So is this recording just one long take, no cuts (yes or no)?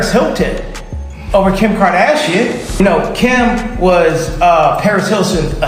yes